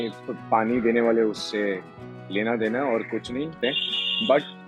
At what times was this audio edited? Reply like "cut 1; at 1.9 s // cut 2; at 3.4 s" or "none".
cut 1; at 3.6 s